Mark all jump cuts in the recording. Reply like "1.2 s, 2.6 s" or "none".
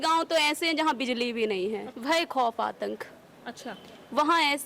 1.9 s